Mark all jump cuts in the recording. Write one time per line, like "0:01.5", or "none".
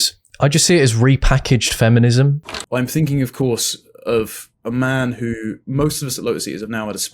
0:02.5